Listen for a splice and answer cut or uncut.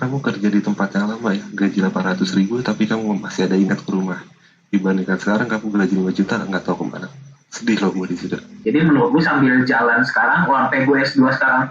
cut